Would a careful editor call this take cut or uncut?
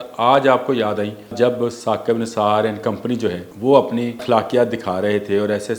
cut